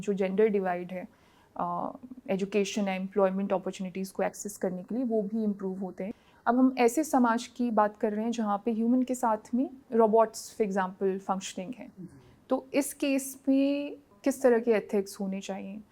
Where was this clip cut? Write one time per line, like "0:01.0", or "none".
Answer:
0:06.1
0:09.8
0:14.1